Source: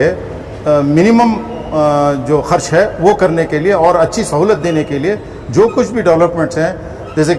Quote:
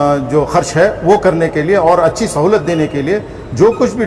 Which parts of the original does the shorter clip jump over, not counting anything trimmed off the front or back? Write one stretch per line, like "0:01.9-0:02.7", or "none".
none